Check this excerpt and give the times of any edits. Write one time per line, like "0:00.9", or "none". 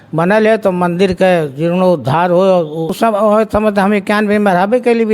0:02.9

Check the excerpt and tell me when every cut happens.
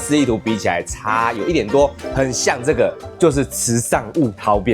0:02.0

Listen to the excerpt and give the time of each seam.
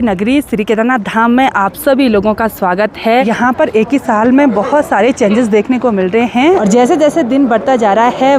0:03.3
0:06.6

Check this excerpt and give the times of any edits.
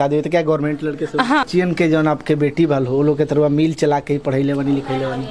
0:01.4

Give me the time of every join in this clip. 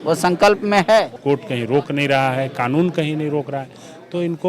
0:01.2

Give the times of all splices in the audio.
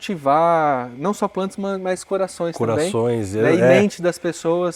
none

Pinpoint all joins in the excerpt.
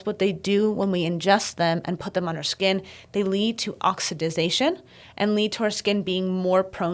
none

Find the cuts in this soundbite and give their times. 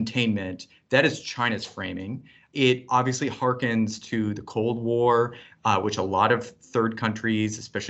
none

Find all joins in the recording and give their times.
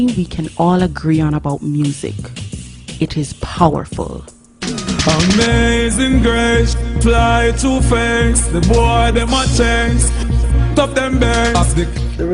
none

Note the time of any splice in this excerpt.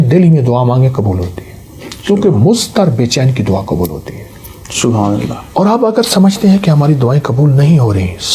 none

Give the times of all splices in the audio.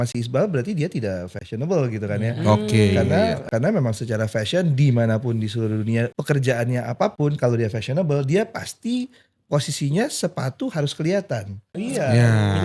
0:03.4
0:06.2
0:11.6

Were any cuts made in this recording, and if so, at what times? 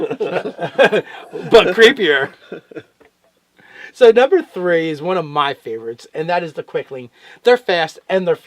none

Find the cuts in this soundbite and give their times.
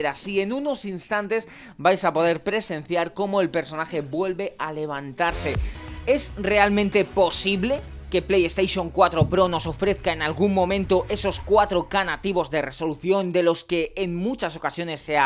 0:05.8

